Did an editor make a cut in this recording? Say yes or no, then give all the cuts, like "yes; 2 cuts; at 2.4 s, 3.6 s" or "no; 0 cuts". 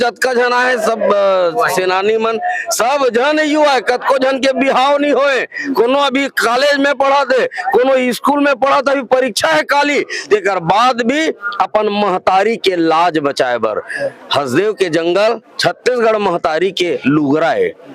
no; 0 cuts